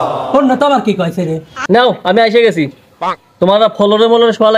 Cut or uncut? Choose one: cut